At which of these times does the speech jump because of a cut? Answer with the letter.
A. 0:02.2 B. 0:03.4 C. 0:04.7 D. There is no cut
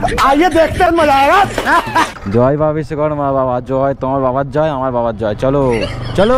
A